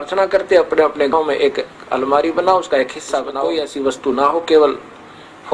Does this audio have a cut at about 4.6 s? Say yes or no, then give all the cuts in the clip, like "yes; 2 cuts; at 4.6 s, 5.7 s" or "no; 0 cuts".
no; 2 cuts; at 1.1 s, 3.3 s